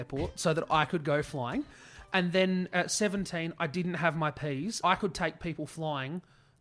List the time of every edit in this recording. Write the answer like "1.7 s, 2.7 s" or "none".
4.8 s